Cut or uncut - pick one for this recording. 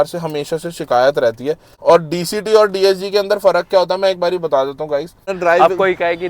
cut